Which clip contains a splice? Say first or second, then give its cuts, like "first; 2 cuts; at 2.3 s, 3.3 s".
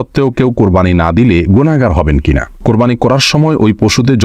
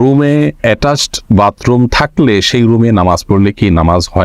first; 1 cut; at 2.6 s